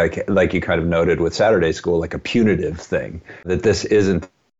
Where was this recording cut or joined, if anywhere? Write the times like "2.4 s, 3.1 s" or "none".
3.5 s